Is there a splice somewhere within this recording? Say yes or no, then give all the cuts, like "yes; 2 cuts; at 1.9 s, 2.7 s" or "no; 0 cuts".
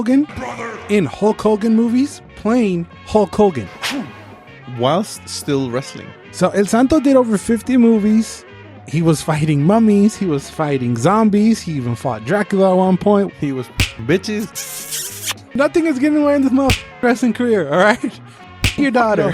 yes; 2 cuts; at 4.5 s, 15.0 s